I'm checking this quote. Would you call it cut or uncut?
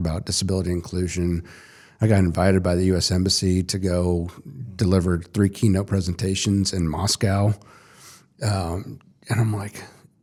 uncut